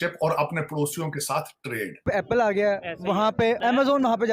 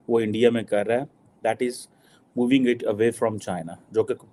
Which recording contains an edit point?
first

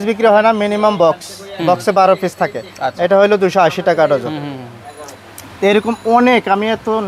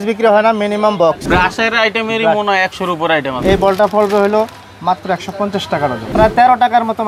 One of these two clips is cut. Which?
second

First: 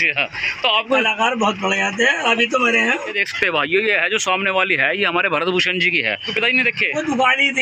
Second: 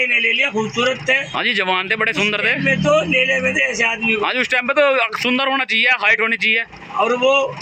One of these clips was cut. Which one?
first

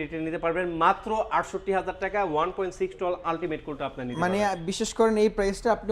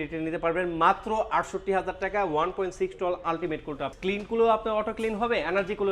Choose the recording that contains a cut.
second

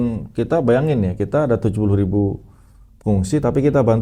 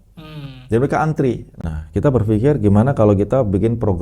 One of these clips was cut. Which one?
second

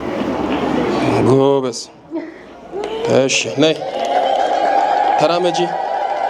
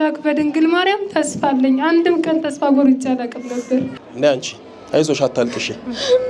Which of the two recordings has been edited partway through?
second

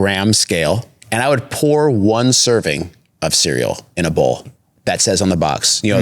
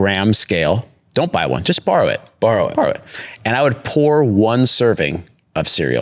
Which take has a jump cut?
first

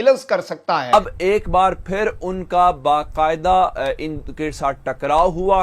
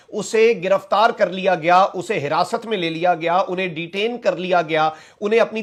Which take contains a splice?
first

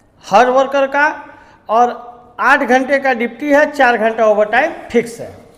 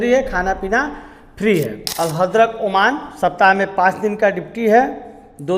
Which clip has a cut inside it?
second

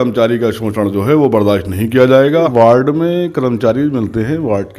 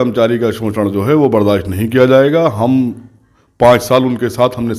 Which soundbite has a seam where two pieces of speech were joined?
first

